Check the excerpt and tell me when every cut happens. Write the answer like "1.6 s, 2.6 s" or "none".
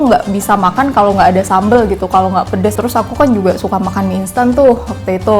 2.8 s